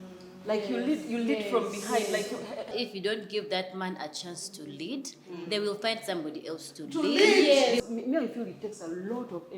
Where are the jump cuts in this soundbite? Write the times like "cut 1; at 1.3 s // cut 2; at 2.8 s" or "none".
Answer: cut 1; at 2.7 s // cut 2; at 7.9 s